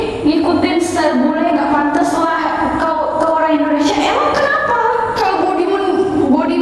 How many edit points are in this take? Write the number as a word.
zero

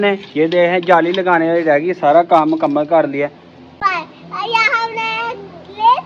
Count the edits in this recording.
one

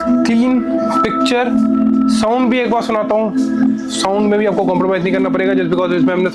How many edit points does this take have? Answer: zero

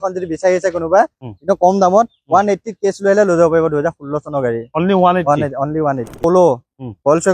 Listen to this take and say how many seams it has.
one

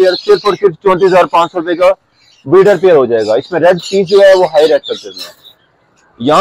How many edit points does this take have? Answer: zero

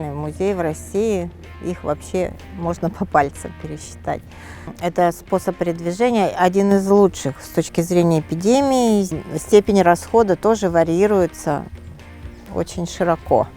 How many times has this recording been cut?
two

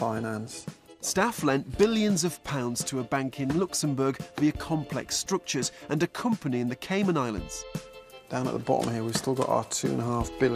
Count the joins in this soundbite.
one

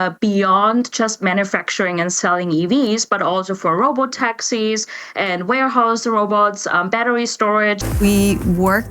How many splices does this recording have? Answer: one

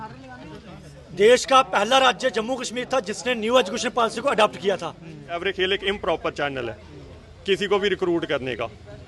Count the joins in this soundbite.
one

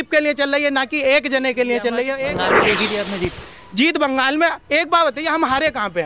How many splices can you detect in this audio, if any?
one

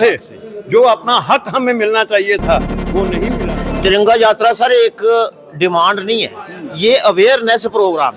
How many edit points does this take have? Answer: one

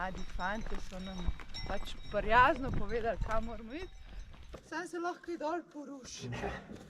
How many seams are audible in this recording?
one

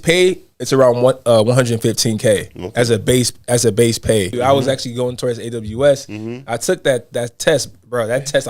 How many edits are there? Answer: one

